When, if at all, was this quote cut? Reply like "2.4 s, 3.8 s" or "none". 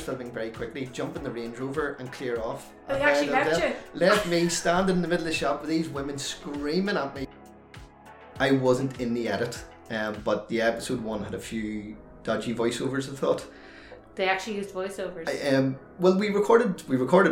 7.8 s